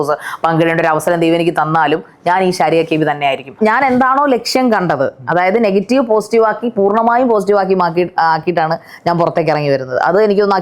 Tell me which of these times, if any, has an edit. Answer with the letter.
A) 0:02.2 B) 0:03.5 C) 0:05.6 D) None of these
B